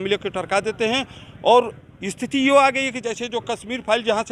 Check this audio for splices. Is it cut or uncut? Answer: uncut